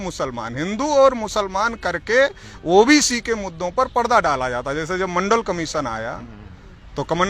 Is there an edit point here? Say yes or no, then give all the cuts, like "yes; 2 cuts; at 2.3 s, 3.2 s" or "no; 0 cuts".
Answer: no; 0 cuts